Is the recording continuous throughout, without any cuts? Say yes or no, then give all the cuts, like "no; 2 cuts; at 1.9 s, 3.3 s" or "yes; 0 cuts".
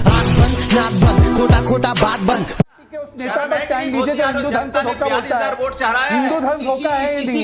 no; 1 cut; at 2.7 s